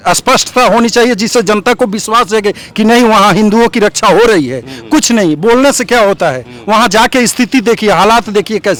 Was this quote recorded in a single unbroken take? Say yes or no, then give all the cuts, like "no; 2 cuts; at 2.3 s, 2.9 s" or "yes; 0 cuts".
yes; 0 cuts